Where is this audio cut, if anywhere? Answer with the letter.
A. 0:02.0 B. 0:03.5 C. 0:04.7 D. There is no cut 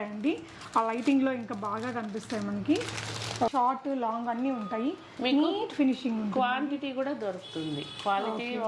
B